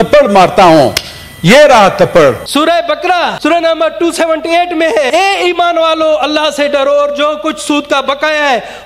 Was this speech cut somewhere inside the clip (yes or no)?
yes